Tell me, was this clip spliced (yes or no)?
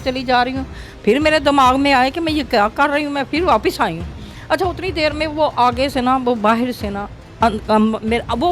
no